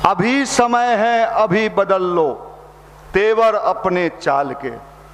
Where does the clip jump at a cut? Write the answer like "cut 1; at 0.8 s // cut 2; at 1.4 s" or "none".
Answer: none

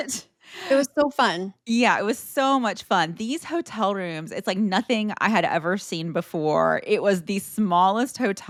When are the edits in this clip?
none

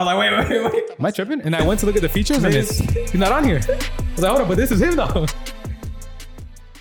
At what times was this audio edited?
none

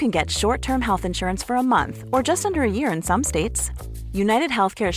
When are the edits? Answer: none

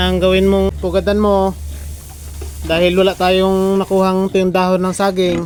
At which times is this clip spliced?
none

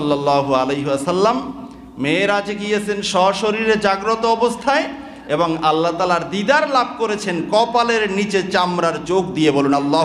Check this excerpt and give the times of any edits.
none

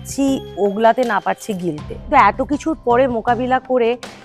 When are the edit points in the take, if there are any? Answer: cut 1; at 1.9 s

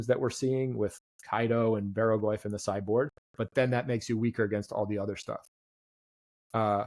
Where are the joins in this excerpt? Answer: none

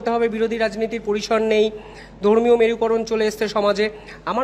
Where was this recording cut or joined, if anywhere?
none

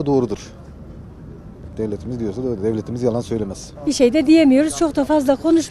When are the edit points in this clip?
cut 1; at 3.6 s

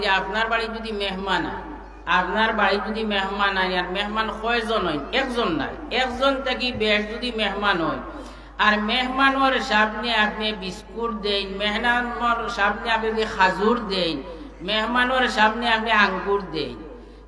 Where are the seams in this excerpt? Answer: none

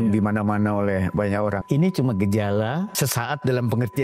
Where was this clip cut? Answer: cut 1; at 1.6 s // cut 2; at 2.9 s

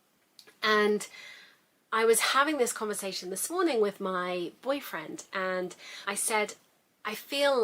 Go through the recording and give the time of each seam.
cut 1; at 6.0 s

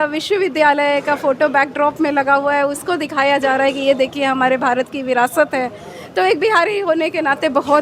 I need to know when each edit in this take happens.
none

